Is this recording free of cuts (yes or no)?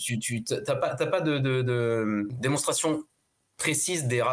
no